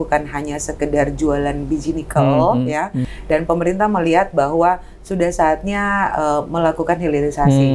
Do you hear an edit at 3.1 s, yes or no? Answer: yes